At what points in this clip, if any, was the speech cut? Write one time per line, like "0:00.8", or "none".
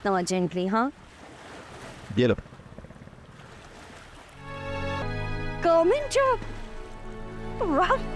0:05.0